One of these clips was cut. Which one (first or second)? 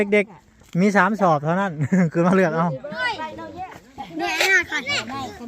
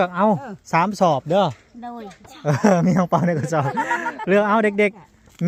first